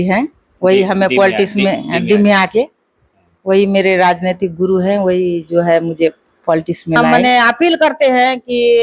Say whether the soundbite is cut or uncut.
cut